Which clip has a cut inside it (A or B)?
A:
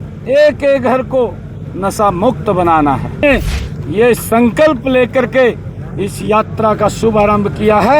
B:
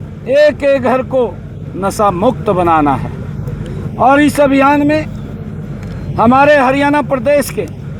A